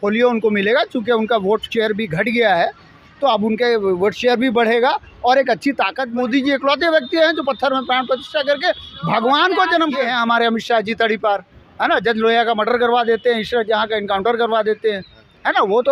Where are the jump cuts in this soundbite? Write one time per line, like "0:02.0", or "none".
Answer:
0:06.0
0:10.0